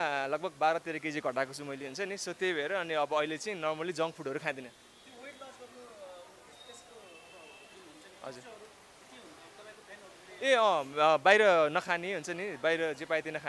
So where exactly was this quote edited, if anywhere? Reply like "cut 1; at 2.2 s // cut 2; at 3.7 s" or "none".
none

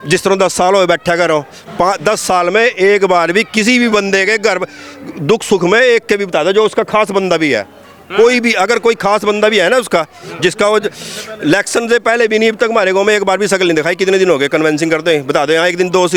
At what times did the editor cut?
none

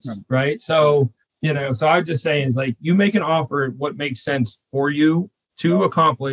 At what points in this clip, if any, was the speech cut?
cut 1; at 1.3 s

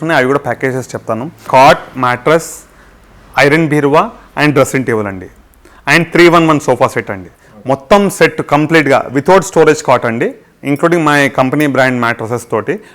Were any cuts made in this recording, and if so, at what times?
cut 1; at 1.4 s

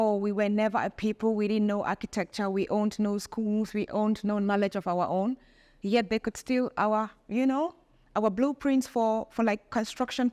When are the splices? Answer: none

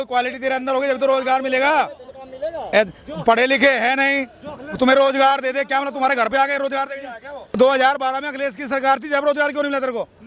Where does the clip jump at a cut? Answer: cut 1; at 7.5 s

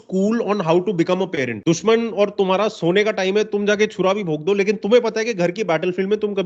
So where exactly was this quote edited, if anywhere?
cut 1; at 1.6 s

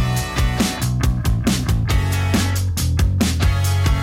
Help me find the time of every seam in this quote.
cut 1; at 1.1 s

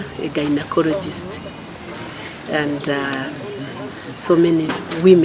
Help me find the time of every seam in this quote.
none

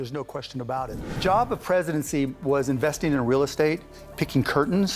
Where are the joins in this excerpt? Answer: cut 1; at 1.1 s

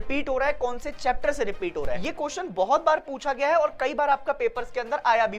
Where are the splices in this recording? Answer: cut 1; at 2.0 s

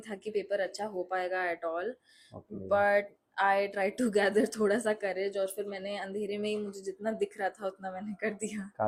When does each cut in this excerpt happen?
none

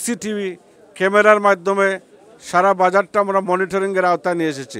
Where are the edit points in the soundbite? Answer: none

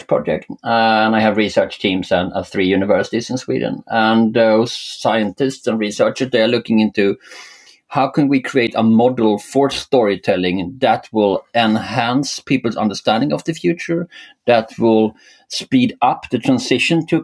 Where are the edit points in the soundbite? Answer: none

